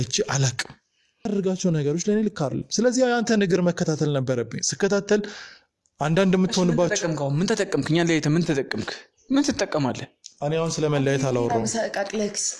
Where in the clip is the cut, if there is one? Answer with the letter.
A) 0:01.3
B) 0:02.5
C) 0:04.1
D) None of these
A